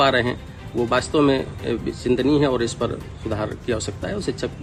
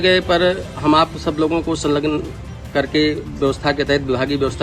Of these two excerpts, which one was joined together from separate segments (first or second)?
second